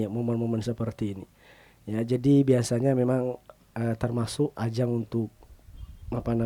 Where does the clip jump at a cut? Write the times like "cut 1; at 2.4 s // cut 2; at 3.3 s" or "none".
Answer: none

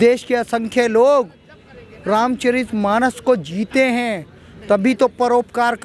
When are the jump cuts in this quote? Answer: none

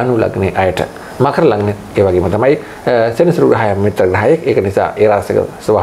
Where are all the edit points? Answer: none

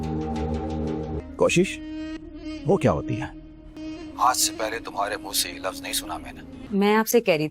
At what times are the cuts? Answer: cut 1; at 1.2 s

